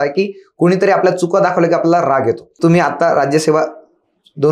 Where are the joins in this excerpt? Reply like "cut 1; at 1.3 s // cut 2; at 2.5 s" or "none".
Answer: cut 1; at 2.5 s